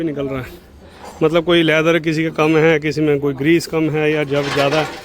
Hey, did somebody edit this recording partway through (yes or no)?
no